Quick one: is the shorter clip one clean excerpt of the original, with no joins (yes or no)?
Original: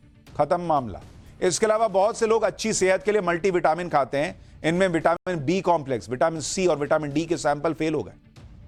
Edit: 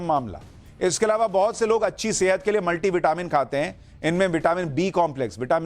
no